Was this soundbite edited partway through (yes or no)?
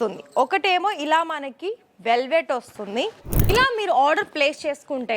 yes